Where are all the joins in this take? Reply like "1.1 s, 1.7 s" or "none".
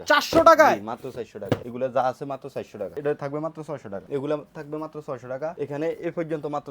1.7 s, 2.8 s, 4.0 s, 5.5 s